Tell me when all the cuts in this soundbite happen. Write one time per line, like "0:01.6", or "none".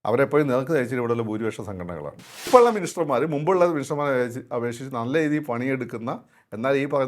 0:02.5